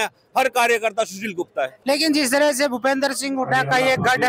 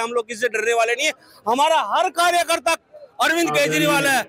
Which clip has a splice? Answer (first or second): first